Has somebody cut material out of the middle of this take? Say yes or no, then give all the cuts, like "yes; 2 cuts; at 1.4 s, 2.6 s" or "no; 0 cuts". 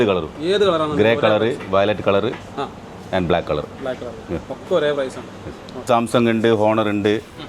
yes; 1 cut; at 5.9 s